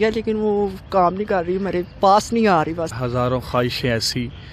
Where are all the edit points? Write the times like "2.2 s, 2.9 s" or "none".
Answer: 2.9 s